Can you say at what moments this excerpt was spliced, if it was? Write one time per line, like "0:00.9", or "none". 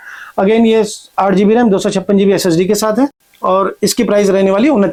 none